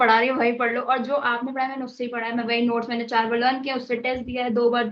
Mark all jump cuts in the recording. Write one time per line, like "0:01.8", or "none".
none